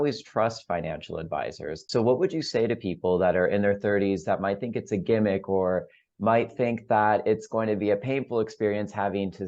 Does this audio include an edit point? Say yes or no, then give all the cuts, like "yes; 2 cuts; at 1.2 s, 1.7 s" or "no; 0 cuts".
yes; 1 cut; at 1.8 s